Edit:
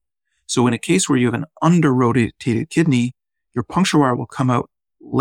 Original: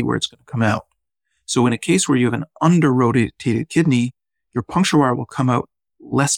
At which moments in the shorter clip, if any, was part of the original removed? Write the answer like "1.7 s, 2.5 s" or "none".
none